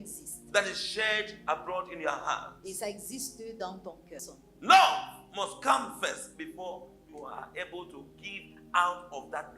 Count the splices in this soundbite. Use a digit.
1